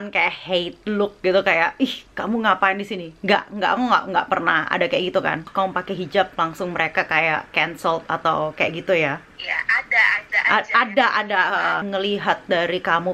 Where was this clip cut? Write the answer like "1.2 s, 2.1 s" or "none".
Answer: 5.5 s, 11.8 s